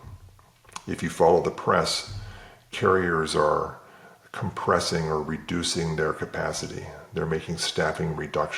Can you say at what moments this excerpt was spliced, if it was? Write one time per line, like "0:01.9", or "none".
none